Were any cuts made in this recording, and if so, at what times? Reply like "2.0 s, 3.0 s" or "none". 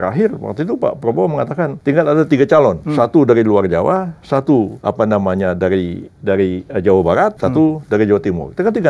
1.8 s, 2.8 s, 4.8 s, 7.4 s